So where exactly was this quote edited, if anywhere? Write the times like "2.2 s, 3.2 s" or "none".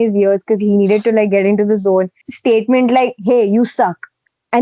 2.2 s